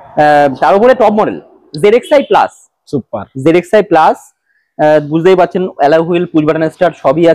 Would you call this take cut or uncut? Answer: uncut